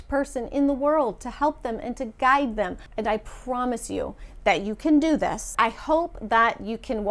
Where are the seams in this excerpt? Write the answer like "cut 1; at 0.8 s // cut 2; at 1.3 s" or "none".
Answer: cut 1; at 2.8 s // cut 2; at 5.5 s